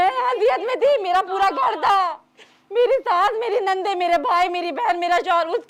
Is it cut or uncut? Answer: uncut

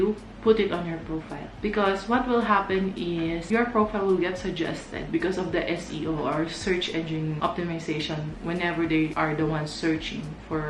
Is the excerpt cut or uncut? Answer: uncut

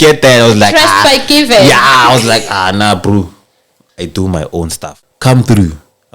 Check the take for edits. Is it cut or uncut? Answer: cut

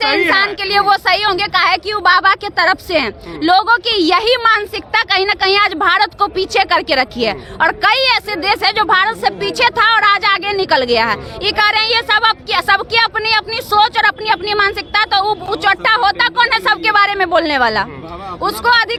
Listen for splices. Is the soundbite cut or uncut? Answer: uncut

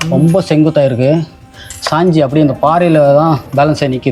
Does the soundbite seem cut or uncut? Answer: uncut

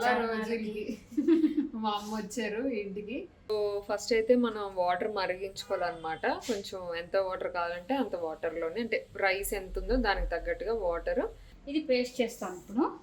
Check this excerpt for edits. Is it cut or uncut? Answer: cut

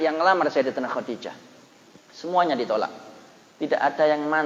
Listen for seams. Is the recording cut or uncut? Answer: uncut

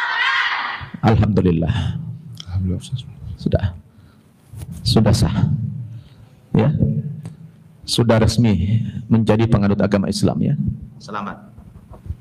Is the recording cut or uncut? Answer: uncut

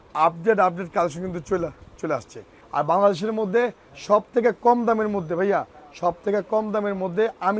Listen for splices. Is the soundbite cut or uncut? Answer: cut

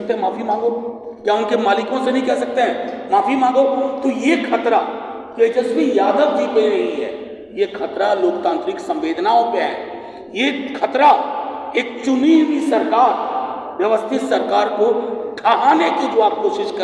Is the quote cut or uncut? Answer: uncut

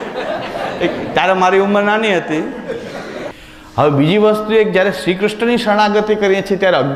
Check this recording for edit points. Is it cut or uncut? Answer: cut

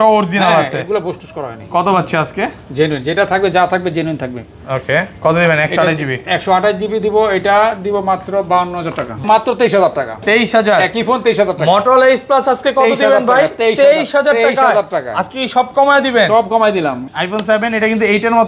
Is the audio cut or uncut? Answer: cut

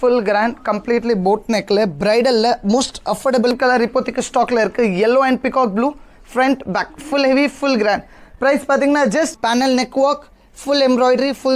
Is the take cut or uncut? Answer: cut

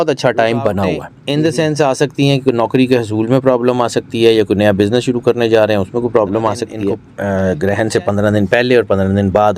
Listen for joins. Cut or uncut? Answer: cut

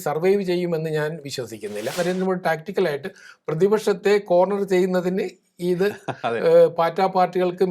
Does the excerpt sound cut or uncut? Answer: cut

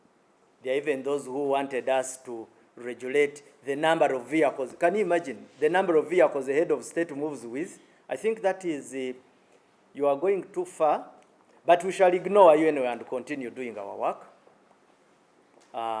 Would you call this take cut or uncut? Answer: uncut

